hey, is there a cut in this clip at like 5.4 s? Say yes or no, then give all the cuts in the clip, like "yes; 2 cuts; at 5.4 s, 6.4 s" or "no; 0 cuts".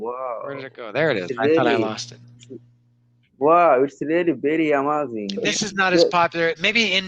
yes; 1 cut; at 5.4 s